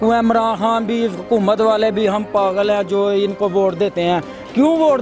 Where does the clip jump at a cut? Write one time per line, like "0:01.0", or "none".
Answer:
none